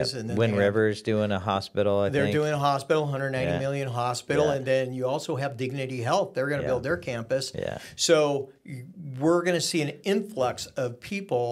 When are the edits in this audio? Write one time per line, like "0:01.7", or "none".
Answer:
none